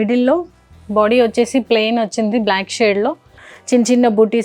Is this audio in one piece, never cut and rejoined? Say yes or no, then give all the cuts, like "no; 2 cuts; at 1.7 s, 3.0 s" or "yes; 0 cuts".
no; 1 cut; at 3.4 s